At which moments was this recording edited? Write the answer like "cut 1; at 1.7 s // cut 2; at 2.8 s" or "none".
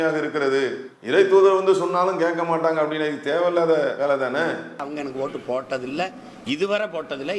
cut 1; at 4.8 s

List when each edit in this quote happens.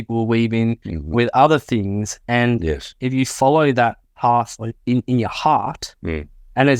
none

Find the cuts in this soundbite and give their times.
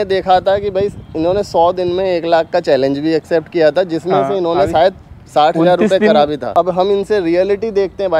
cut 1; at 6.5 s

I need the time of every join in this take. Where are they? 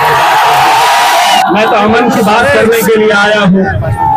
cut 1; at 1.4 s

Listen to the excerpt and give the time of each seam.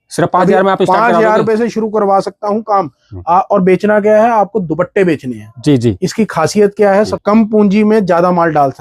cut 1; at 7.1 s

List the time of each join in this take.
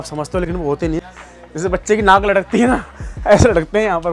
cut 1; at 1.0 s

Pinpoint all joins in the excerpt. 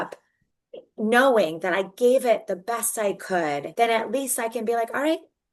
cut 1; at 3.7 s

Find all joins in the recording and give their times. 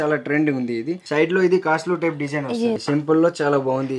cut 1; at 1.0 s // cut 2; at 2.8 s

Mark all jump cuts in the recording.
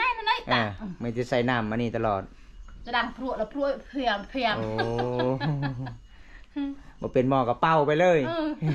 none

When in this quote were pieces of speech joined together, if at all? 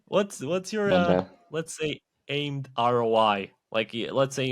cut 1; at 3.6 s

